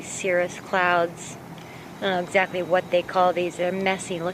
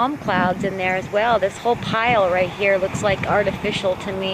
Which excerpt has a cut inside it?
second; 1 cut; at 1.0 s

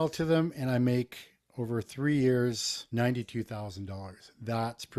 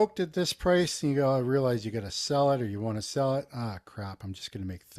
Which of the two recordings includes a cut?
first; 1 cut; at 2.7 s

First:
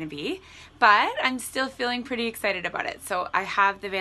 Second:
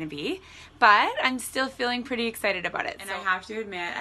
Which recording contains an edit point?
second; 1 cut; at 3.0 s

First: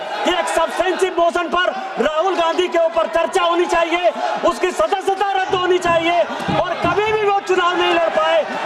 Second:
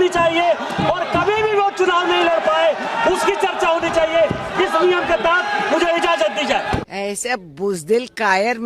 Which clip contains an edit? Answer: second; 1 cut; at 6.8 s

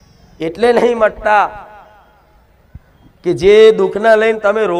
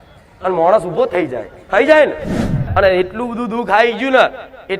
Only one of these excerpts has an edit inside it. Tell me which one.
second; 1 cut; at 2.5 s

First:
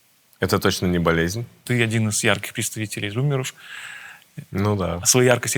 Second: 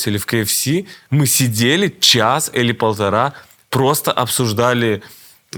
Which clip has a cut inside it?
first; 1 cut; at 1.6 s

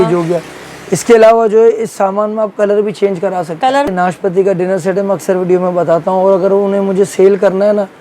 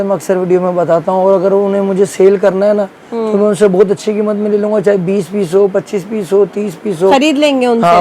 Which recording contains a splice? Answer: first; 1 cut; at 3.9 s

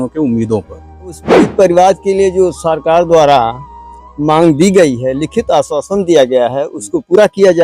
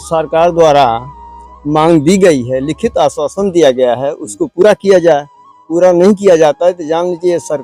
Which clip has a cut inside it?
first; 1 cut; at 1.4 s

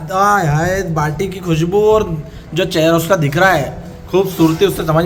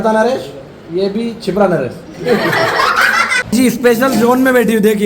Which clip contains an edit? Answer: second; 1 cut; at 3.3 s

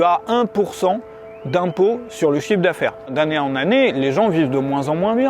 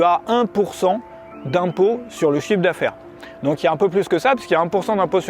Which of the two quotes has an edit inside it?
first; 1 cut; at 3.1 s

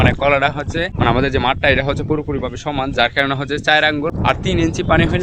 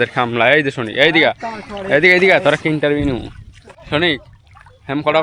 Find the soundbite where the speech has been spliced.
first; 2 cuts; at 0.9 s, 4.1 s

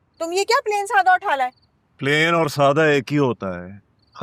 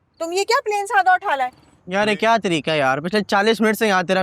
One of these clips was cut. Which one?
second; 1 cut; at 1.7 s

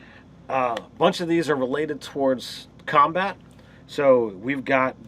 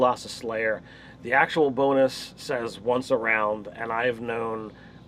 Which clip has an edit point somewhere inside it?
first; 1 cut; at 3.6 s

